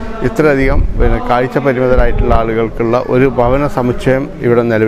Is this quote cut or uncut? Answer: uncut